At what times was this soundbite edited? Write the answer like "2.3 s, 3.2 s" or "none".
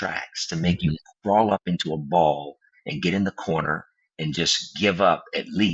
none